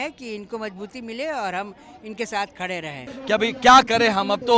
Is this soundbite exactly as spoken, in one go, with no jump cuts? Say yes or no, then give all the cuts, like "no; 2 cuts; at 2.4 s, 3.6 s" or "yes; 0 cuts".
no; 1 cut; at 3.1 s